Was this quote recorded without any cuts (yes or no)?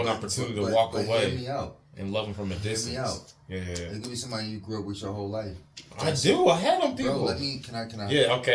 yes